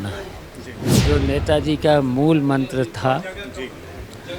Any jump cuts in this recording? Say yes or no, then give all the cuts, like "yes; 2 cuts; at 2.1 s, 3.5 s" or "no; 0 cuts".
yes; 1 cut; at 1.0 s